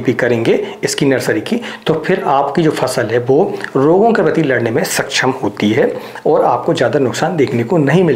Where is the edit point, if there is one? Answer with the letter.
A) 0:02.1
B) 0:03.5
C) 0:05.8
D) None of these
D